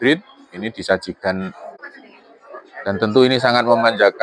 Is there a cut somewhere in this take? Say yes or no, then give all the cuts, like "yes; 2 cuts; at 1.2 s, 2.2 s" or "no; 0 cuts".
yes; 1 cut; at 1.8 s